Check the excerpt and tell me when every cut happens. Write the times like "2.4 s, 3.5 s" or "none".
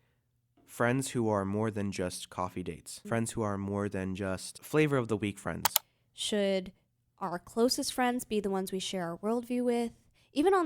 2.9 s, 4.5 s, 5.9 s